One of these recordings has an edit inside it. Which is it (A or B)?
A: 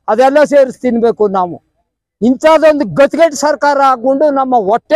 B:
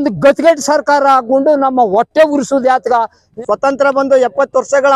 B